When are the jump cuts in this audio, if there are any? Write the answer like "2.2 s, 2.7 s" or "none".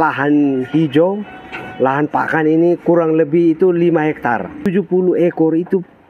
4.6 s